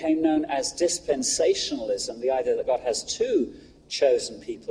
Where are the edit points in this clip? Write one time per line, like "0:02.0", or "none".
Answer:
none